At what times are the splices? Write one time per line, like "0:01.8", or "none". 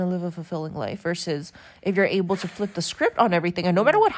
none

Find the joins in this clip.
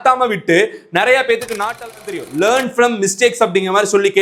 0:01.8

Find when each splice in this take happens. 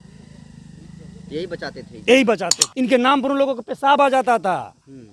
0:02.6

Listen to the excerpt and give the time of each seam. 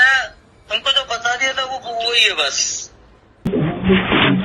0:03.5

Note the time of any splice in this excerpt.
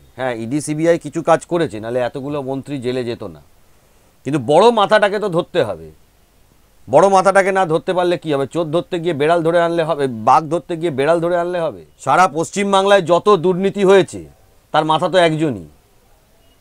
0:11.9

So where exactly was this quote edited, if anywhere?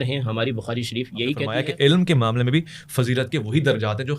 0:01.5

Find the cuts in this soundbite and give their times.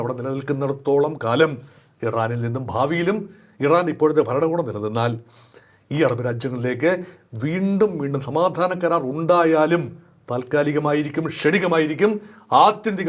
none

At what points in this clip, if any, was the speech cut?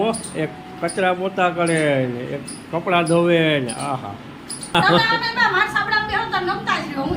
0:04.7

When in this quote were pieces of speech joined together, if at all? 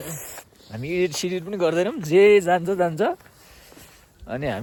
none

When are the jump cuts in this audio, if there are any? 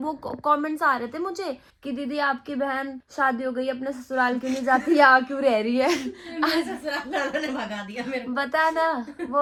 none

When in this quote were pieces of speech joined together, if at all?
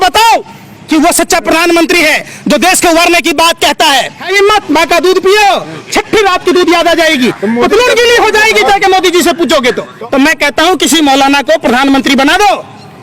0:04.2
0:09.9

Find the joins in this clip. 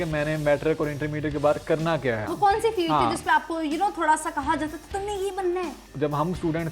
0:02.3
0:05.8

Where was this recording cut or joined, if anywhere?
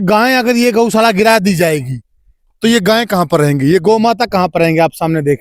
none

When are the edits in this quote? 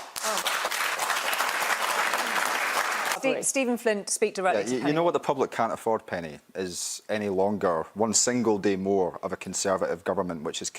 0:03.1

